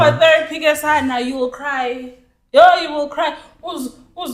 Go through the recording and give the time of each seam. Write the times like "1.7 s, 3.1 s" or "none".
none